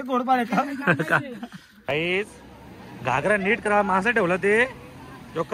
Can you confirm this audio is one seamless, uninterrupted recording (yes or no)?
no